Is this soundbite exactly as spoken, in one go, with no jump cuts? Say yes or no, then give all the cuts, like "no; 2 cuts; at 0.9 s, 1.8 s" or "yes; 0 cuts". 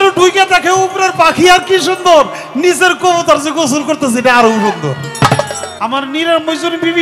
no; 1 cut; at 5.7 s